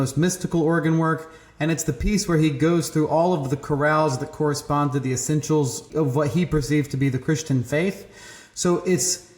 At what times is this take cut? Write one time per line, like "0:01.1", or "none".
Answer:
0:05.9